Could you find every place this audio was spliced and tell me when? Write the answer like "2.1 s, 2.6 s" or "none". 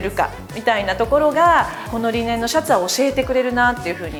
none